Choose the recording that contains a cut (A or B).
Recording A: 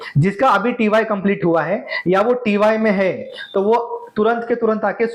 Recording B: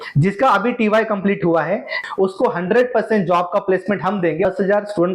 B